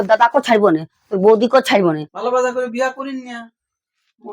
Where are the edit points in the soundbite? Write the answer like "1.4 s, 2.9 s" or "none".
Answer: 2.1 s